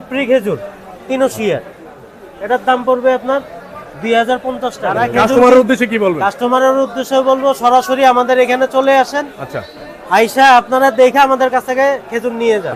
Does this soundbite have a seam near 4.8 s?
yes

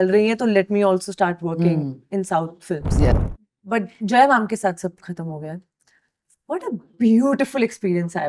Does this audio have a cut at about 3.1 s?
yes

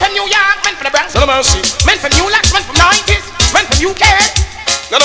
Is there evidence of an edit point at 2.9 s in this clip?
no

